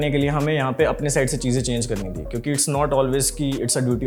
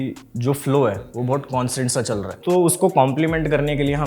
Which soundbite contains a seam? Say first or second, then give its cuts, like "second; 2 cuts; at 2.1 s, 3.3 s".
second; 1 cut; at 2.3 s